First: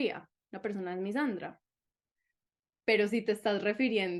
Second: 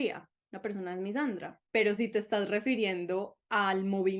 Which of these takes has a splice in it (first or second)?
second